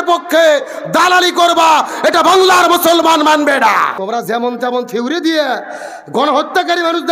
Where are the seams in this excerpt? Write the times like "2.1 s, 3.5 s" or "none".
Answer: 4.0 s